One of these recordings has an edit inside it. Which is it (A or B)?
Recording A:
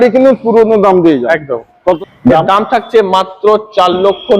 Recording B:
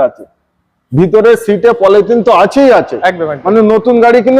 A